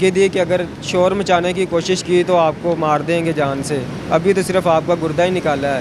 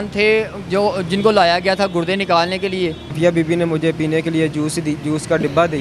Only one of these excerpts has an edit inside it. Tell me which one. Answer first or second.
second